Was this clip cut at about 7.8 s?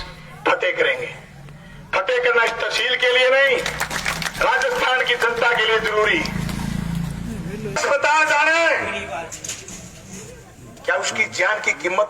yes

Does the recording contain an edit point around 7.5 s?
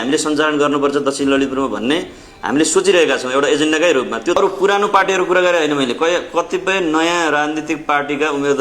no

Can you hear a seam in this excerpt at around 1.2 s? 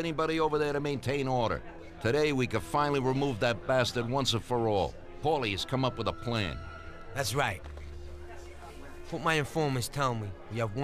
no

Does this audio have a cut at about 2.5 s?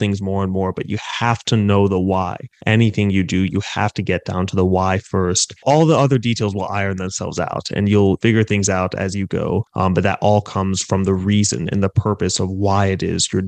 no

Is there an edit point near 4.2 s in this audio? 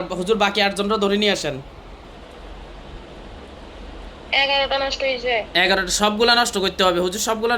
no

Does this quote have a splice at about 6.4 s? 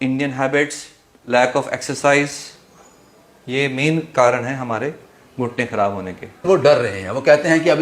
yes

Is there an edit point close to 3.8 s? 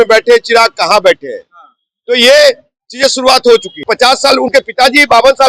yes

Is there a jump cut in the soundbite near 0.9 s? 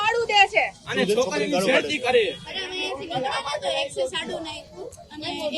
no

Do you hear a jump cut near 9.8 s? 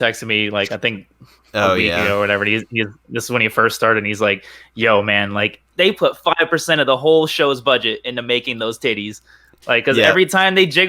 no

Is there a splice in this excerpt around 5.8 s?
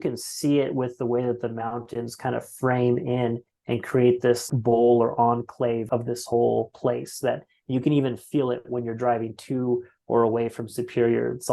yes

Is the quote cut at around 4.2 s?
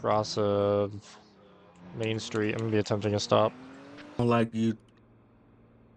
yes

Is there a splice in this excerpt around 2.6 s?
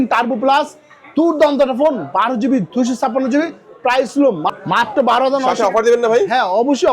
no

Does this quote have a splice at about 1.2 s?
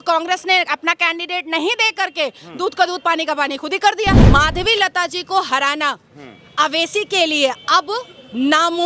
no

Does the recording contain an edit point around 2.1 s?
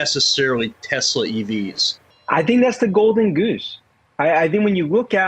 yes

